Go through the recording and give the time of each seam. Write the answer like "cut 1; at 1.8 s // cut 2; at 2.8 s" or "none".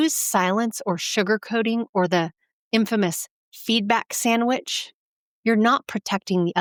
none